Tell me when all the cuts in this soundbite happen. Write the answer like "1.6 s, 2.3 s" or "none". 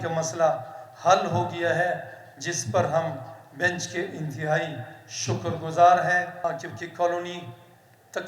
6.3 s